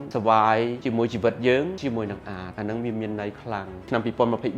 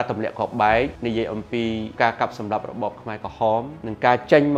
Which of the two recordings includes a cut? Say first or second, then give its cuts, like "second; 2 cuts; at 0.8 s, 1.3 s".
first; 2 cuts; at 1.8 s, 3.9 s